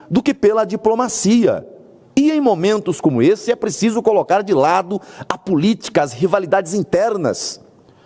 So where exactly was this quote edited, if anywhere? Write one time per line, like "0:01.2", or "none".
none